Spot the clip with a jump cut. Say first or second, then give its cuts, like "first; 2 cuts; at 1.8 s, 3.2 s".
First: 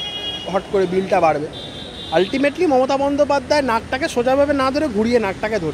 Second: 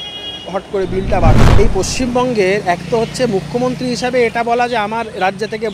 second; 1 cut; at 1.6 s